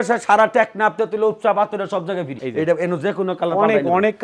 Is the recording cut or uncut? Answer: cut